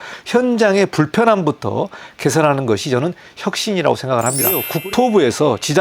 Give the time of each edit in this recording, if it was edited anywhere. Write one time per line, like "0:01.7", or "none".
0:04.7